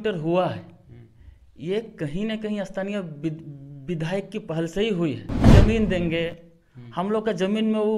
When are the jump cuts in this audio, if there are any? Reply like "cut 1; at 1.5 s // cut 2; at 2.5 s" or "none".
cut 1; at 5.4 s